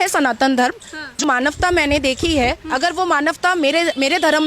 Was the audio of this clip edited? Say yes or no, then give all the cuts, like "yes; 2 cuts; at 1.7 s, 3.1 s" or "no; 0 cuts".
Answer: yes; 1 cut; at 1.2 s